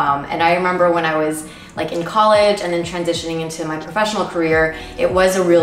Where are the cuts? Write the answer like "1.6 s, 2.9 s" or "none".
none